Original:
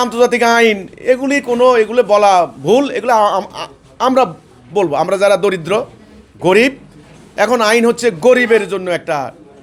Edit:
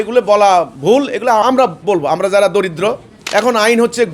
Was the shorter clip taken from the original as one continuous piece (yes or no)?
no